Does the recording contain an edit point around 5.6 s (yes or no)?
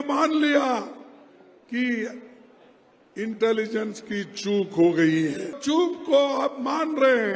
yes